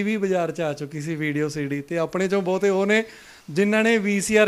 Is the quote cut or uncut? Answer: uncut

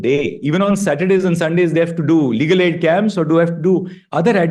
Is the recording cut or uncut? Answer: uncut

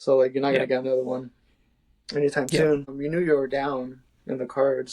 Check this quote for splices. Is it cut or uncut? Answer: cut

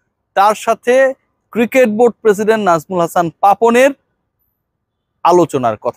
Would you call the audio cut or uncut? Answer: uncut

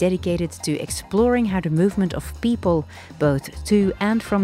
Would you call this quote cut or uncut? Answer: uncut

